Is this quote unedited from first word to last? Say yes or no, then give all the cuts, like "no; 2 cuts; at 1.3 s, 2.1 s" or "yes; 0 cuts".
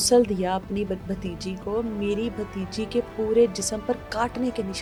yes; 0 cuts